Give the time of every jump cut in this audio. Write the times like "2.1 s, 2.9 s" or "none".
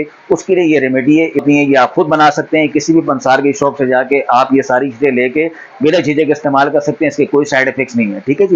1.4 s